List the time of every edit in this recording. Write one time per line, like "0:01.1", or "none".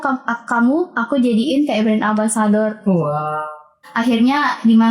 0:03.8

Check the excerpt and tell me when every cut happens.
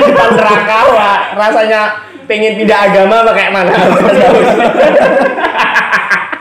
none

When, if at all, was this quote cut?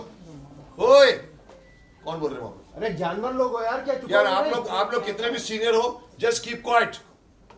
none

